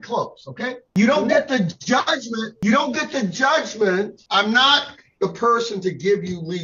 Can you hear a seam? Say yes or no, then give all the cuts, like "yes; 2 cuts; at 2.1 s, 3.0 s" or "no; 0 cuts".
yes; 2 cuts; at 0.9 s, 4.2 s